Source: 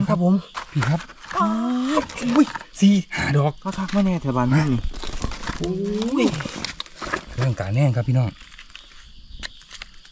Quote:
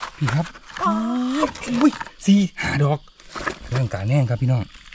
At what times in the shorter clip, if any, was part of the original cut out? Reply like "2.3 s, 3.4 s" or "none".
3.1 s